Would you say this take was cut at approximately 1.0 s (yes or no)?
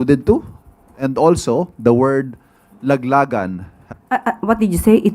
no